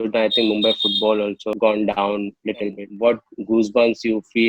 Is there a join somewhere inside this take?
yes; 1 cut; at 2.8 s

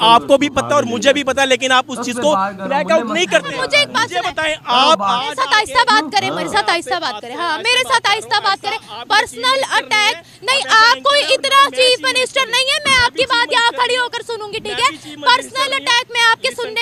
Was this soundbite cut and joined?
no; 0 cuts

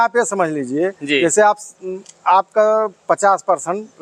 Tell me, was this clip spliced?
no; 0 cuts

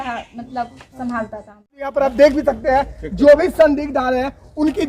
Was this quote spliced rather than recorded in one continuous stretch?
yes; 1 cut; at 1.9 s

